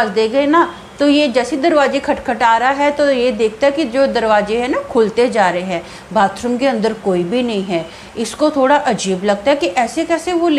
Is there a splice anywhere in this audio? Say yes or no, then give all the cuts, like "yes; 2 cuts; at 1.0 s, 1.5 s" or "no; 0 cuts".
no; 0 cuts